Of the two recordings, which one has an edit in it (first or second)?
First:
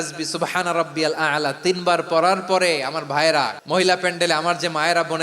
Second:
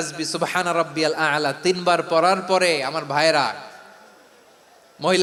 first